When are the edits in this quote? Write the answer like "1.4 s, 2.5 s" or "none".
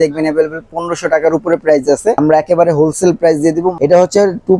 2.2 s, 3.7 s

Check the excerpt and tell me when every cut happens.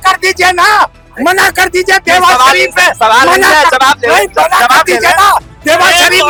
none

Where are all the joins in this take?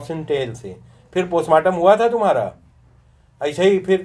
none

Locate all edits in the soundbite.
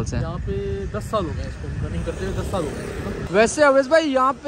3.2 s

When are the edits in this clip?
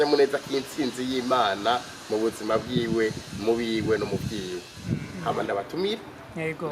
5.1 s

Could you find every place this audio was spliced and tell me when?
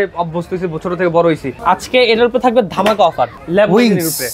1.5 s, 3.4 s

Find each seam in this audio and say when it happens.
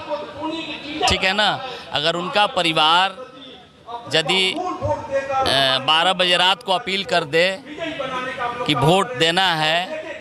none

